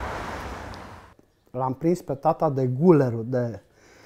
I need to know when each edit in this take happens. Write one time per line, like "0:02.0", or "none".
0:01.1